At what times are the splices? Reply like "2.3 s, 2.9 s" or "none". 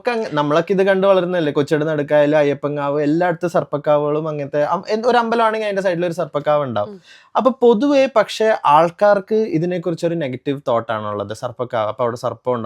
none

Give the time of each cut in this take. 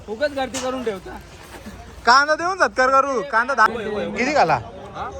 3.7 s

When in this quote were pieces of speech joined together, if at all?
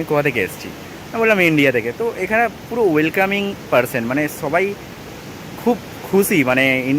none

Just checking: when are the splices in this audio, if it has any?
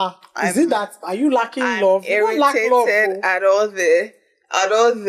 none

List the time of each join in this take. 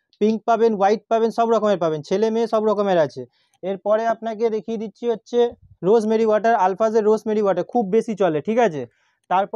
none

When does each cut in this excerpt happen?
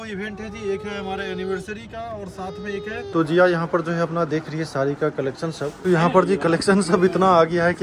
3.1 s, 5.7 s

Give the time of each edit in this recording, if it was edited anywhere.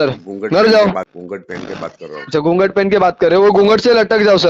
1.2 s

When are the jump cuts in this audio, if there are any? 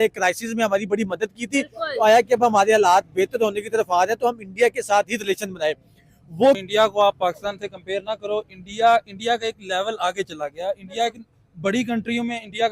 6.6 s

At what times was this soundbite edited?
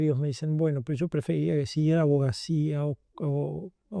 none

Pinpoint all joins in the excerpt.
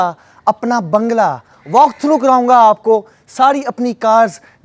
none

